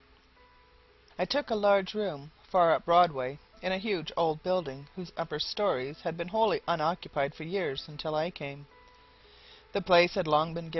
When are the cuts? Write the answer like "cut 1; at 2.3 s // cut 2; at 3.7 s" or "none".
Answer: none